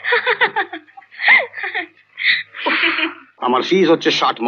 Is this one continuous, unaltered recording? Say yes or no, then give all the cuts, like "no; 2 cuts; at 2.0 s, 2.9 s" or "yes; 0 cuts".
no; 1 cut; at 3.2 s